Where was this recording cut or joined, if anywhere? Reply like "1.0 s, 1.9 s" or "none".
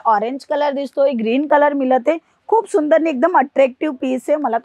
none